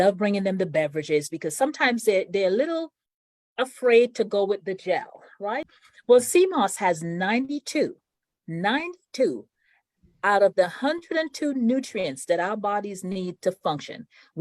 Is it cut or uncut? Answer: cut